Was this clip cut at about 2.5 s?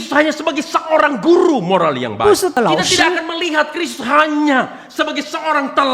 yes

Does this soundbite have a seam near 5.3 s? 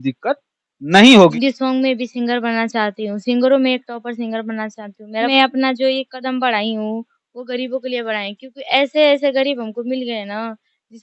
yes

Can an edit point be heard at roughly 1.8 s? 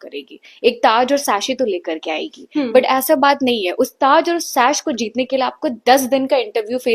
no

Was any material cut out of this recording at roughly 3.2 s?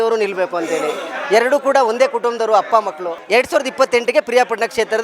yes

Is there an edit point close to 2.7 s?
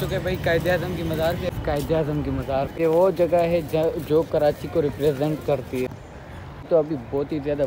yes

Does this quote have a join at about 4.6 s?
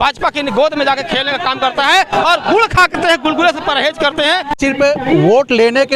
yes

